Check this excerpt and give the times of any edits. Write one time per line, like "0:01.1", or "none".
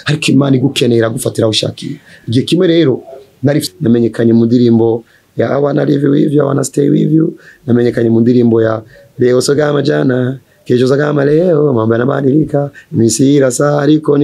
0:03.6